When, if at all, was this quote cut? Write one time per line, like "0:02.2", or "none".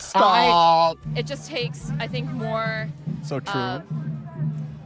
0:01.1